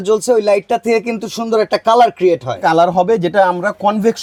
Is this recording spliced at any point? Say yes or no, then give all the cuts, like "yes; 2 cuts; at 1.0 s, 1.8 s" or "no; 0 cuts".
no; 0 cuts